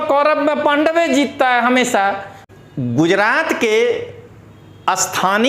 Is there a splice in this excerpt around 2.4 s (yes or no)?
yes